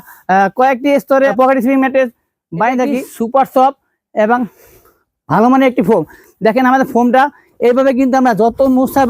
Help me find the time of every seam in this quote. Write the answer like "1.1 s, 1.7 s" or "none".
1.3 s, 3.1 s